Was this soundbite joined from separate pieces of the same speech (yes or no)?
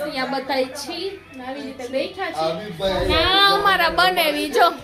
no